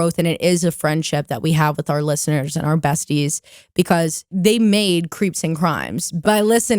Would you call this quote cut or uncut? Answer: cut